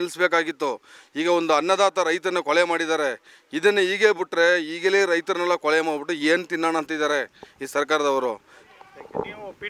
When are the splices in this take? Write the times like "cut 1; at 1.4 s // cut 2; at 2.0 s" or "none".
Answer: none